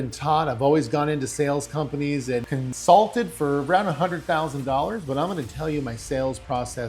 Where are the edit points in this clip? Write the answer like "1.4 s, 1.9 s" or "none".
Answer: 2.6 s